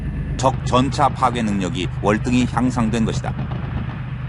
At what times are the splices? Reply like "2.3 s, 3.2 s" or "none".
3.0 s